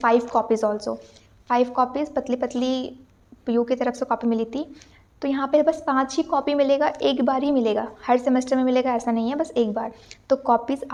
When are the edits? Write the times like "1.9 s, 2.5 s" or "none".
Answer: none